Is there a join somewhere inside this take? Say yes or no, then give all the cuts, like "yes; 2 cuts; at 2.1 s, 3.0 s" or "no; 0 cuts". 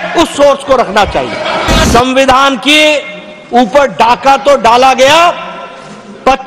yes; 1 cut; at 1.9 s